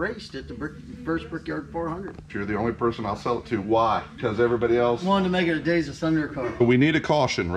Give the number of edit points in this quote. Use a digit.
3